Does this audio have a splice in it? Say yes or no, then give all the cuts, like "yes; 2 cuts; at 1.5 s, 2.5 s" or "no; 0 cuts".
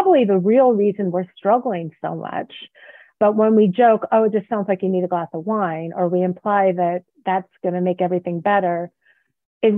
no; 0 cuts